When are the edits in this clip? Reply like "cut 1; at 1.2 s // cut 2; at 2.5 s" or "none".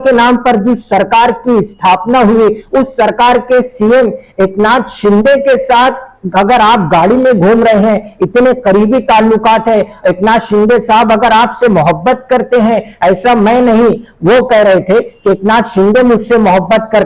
none